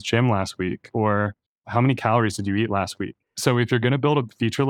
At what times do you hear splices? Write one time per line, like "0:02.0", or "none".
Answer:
0:03.2